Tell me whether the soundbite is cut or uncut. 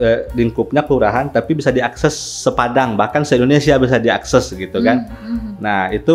uncut